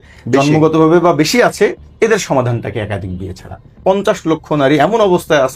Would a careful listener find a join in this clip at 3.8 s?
yes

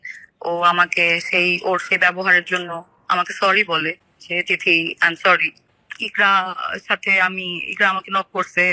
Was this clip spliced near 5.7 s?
yes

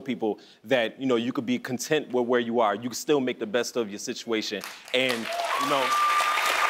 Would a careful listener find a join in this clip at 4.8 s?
no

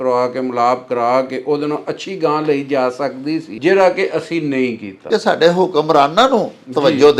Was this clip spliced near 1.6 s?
no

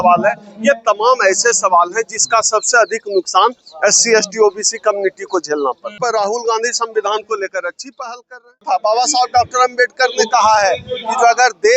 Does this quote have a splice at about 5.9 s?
yes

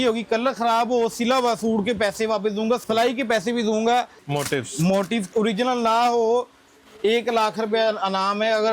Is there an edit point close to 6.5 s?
no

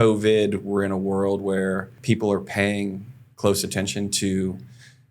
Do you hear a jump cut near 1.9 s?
yes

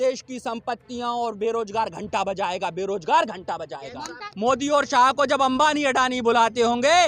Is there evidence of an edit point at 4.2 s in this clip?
yes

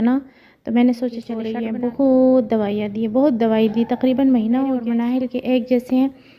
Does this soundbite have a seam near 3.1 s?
no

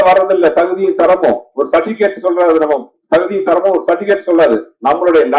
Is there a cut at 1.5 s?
no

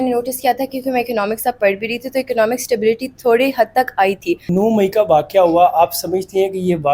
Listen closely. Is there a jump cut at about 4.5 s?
yes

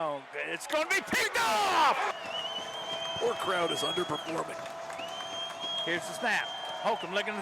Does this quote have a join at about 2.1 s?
yes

